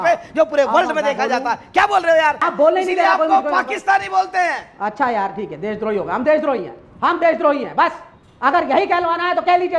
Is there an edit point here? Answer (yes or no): yes